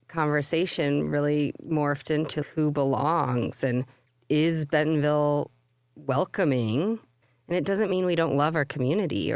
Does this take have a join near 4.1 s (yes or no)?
no